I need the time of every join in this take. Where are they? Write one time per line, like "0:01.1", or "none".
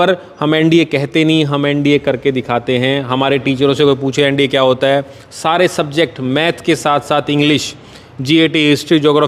none